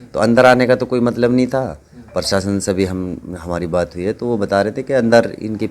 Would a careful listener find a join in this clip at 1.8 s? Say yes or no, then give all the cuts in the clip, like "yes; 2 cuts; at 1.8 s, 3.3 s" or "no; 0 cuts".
no; 0 cuts